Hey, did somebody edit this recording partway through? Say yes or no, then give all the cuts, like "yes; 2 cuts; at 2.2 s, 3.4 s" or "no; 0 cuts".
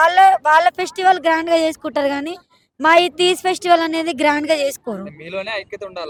no; 0 cuts